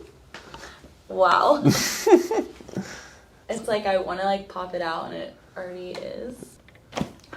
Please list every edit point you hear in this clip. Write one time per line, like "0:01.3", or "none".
0:06.5